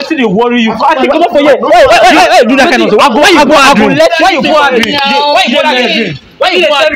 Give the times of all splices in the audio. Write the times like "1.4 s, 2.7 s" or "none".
none